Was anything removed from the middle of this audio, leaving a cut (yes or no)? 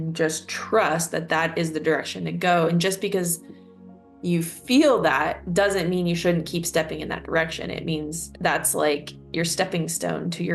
yes